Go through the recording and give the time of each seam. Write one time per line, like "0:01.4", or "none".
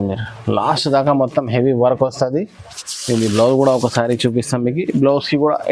none